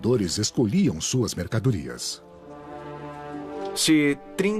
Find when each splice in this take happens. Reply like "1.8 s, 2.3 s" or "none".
0.9 s